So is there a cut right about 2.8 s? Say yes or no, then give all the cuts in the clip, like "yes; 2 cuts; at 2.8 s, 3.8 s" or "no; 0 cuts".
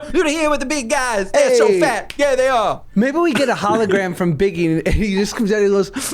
yes; 1 cut; at 2.8 s